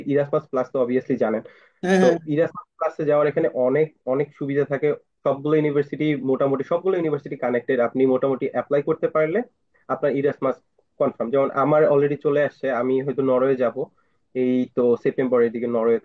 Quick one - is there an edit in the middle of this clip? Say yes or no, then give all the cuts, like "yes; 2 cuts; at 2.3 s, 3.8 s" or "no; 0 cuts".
no; 0 cuts